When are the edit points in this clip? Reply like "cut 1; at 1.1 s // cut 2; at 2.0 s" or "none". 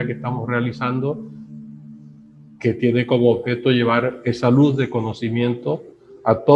none